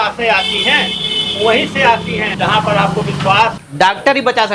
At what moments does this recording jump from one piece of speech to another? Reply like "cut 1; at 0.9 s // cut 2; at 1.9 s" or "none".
cut 1; at 2.3 s // cut 2; at 3.6 s